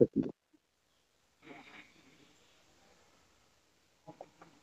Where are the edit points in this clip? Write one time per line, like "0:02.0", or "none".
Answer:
none